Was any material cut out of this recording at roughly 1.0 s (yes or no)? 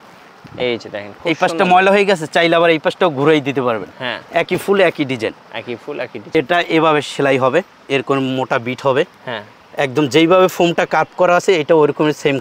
no